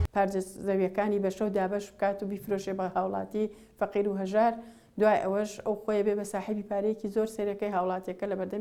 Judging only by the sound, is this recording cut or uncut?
uncut